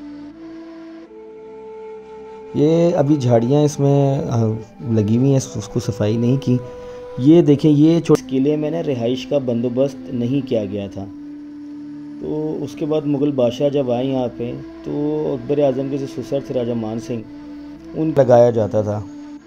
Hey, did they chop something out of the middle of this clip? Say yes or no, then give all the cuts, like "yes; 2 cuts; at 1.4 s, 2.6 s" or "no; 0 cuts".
yes; 2 cuts; at 8.2 s, 18.1 s